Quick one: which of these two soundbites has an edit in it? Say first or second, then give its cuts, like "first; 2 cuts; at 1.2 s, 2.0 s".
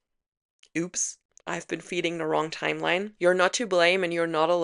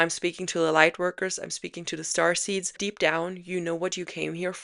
second; 1 cut; at 2.8 s